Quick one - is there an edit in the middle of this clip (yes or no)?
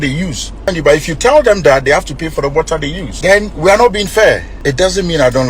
yes